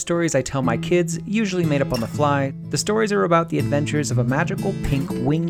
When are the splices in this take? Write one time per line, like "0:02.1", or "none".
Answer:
0:02.6